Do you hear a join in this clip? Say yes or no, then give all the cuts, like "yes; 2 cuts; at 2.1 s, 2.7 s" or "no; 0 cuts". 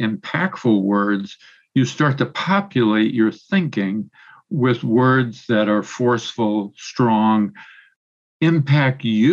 no; 0 cuts